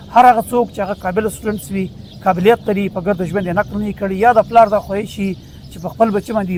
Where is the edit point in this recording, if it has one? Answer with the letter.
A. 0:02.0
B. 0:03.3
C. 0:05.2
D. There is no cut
D